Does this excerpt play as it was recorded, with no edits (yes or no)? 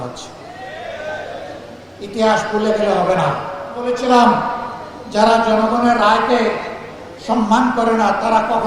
no